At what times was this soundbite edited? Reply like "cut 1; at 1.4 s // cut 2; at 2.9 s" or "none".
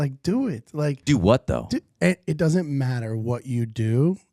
cut 1; at 1.0 s